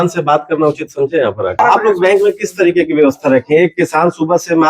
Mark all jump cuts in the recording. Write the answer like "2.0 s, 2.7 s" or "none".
1.6 s